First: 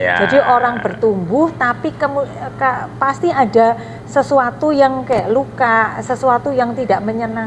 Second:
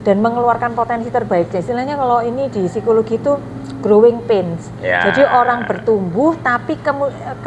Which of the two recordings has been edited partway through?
second; 1 cut; at 1.6 s

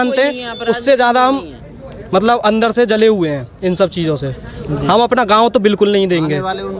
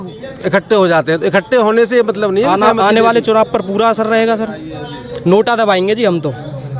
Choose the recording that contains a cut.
second; 1 cut; at 2.5 s

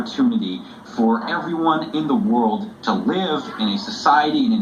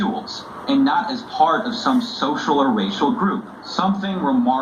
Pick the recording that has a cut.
second; 1 cut; at 3.6 s

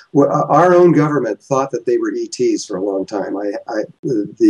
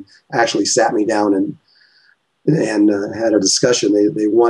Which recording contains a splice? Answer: first; 1 cut; at 1.3 s

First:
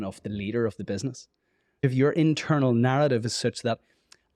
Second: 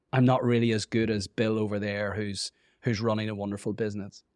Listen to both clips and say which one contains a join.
first; 1 cut; at 1.8 s

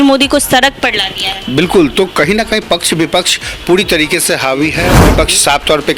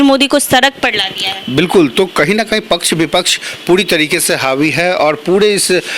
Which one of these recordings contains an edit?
first; 1 cut; at 5.0 s

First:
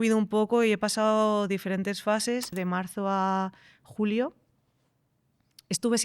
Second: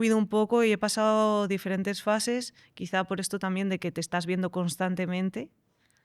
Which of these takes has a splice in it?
first; 1 cut; at 2.5 s

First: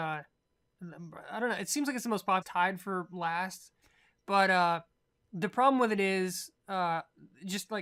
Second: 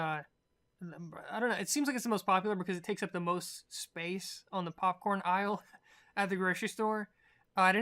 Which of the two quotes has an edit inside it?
second; 1 cut; at 2.4 s

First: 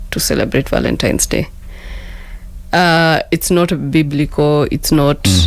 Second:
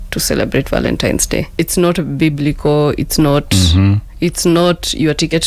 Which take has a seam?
second; 1 cut; at 1.5 s

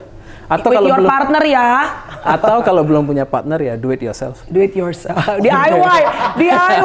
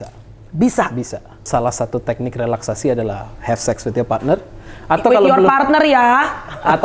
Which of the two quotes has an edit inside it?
second; 1 cut; at 1.4 s

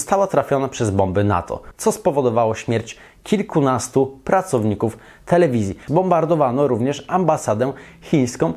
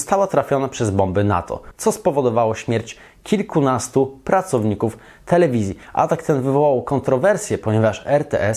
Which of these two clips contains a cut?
first; 1 cut; at 5.8 s

